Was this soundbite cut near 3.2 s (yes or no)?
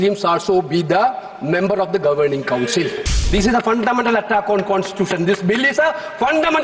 yes